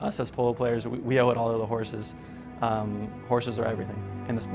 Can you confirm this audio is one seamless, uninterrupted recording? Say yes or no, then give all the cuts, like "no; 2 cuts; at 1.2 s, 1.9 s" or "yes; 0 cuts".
yes; 0 cuts